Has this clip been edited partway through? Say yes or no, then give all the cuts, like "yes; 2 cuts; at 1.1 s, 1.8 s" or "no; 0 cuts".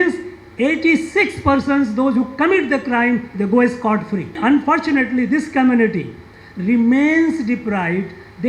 yes; 1 cut; at 4.4 s